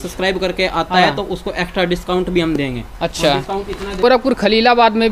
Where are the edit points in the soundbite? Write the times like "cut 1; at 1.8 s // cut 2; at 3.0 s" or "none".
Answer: cut 1; at 4.0 s